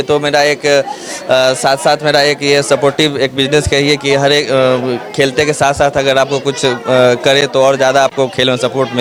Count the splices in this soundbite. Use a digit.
0